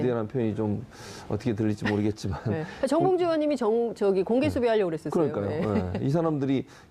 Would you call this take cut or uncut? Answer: uncut